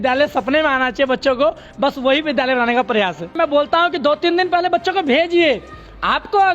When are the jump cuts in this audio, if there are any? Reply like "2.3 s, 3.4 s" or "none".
3.3 s